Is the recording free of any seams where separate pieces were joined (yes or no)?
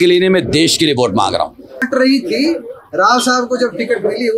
no